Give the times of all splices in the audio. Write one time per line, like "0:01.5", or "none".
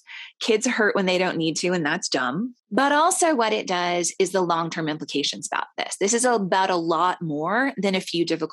0:02.6

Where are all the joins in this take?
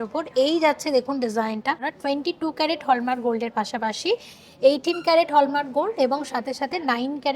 0:01.9

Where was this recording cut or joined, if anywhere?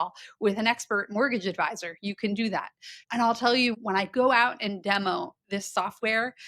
0:03.0
0:03.8

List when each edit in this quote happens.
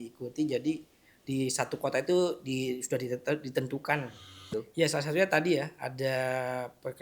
0:04.5

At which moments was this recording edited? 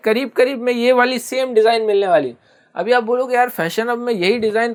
none

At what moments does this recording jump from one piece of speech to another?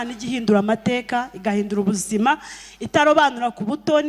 none

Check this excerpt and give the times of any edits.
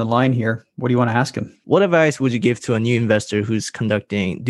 0:01.5

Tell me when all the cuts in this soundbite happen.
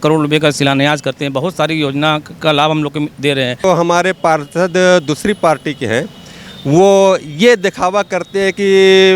0:03.6

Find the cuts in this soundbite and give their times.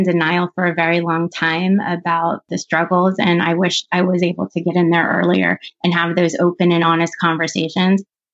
0:02.4

